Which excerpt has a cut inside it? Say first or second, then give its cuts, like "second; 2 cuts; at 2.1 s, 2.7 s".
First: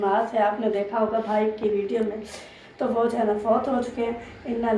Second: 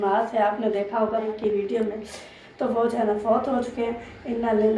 second; 1 cut; at 1.3 s